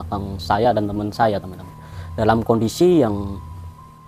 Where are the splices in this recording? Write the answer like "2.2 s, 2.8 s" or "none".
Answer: none